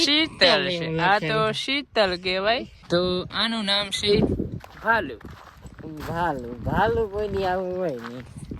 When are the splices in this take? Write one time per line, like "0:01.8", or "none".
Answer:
0:02.7